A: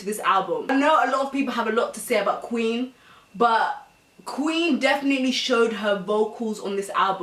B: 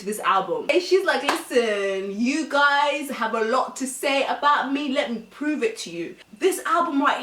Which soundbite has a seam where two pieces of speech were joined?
B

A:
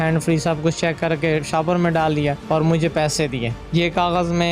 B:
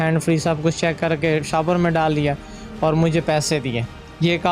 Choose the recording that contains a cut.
A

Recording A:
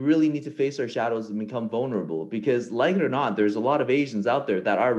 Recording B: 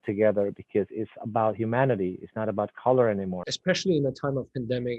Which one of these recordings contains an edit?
B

